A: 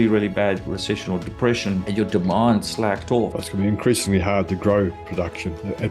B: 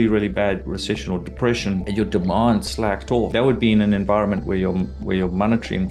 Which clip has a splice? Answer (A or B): A